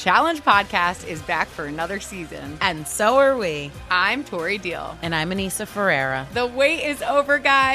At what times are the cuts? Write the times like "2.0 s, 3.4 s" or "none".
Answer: 1.9 s